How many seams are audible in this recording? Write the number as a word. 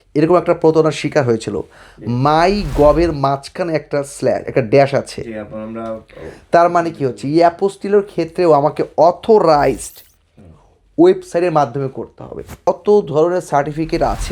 one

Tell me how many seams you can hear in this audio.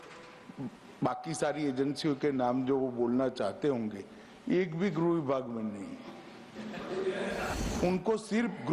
one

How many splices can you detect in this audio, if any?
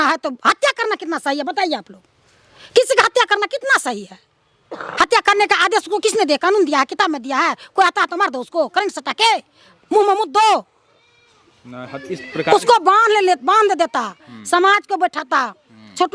zero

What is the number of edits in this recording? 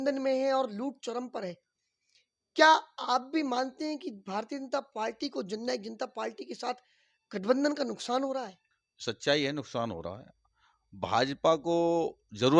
zero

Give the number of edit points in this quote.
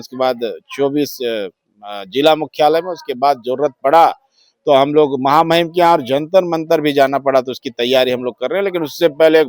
zero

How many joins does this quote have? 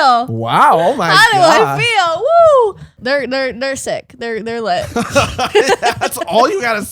one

